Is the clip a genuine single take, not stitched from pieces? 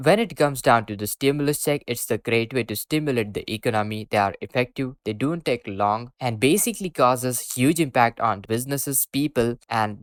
yes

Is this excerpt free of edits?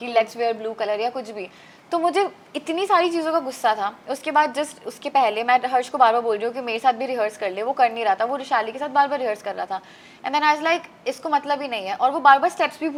yes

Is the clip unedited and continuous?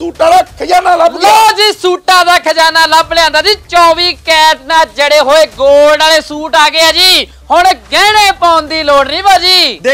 yes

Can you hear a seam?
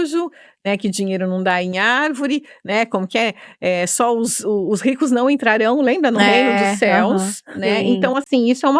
no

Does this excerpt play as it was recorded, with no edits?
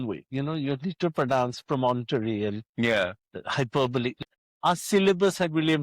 no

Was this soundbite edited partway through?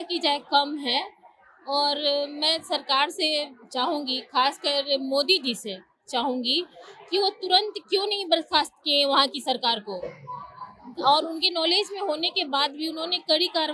no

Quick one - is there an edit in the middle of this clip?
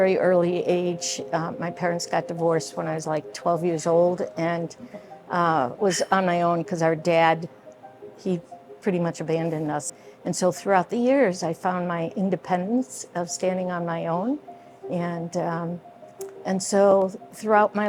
yes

